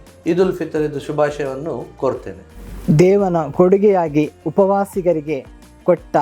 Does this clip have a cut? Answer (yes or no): yes